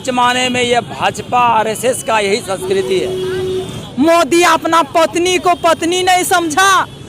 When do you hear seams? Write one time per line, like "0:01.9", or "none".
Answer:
0:03.9